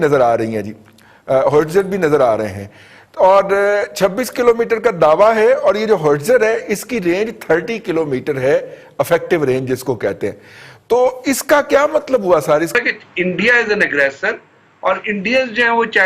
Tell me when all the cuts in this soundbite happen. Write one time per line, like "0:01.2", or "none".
0:12.7